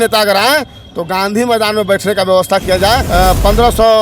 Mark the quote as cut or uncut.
cut